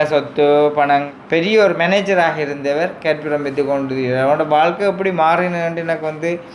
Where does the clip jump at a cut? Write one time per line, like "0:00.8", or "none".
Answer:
0:01.1